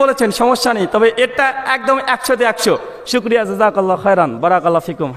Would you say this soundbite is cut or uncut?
uncut